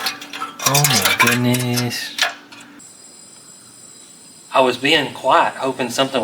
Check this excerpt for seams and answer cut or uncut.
cut